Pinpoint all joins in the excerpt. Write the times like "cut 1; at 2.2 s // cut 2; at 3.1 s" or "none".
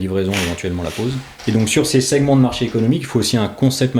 cut 1; at 1.3 s